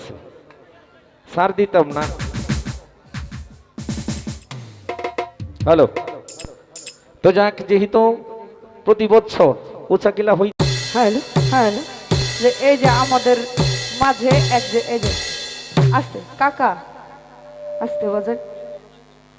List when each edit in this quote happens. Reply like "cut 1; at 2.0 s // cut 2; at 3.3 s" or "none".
none